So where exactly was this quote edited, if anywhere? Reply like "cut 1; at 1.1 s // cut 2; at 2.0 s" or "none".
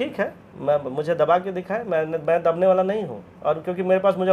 none